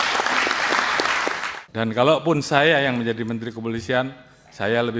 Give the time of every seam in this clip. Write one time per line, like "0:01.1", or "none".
0:01.5

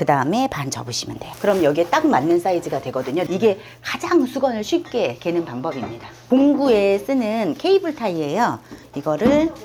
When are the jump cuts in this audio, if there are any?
0:03.3
0:06.1

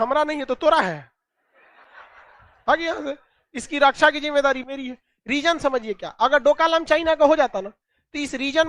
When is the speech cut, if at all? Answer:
none

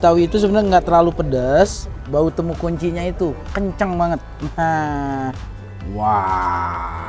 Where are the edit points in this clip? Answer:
0:02.0

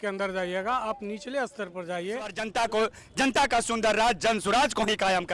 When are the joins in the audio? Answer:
0:02.4

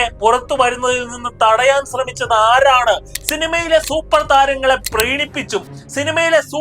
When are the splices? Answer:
0:03.1

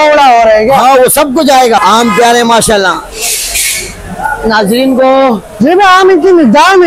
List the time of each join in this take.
0:01.8

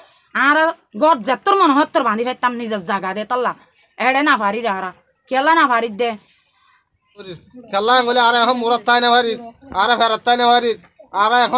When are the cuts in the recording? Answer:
0:07.4

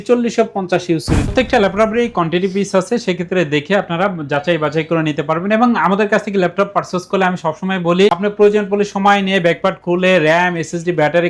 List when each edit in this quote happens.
0:01.2

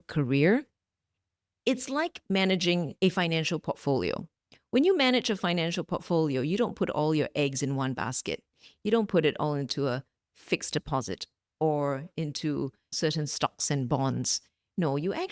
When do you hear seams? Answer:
0:02.9

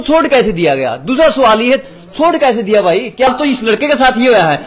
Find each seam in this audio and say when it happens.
0:03.3

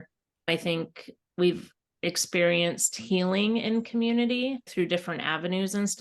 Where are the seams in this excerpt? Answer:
0:04.7

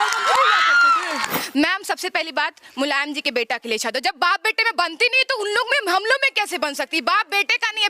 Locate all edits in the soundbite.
0:01.4

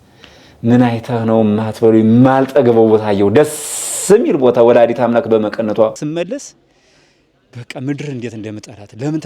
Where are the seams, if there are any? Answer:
0:06.0

